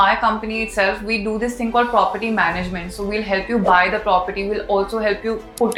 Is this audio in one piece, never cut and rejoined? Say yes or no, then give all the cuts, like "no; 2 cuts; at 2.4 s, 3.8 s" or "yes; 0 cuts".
yes; 0 cuts